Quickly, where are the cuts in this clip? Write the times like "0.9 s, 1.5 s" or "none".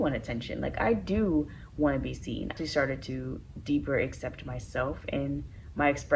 2.5 s